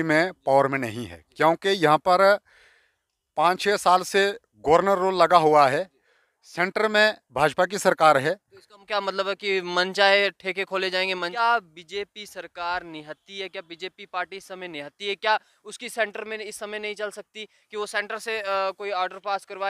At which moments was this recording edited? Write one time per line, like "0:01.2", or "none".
0:11.3